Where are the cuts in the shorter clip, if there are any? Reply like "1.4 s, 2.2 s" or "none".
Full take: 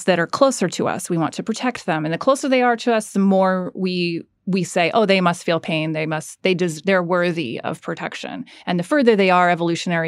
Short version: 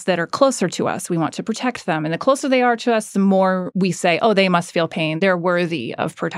3.7 s, 5.1 s